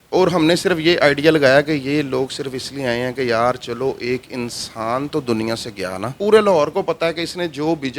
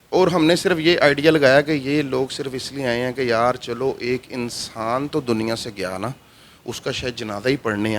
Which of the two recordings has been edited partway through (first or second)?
first